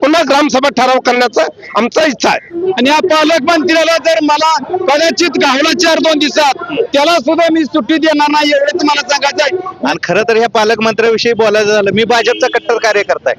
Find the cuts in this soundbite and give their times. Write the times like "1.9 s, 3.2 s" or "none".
2.5 s, 9.8 s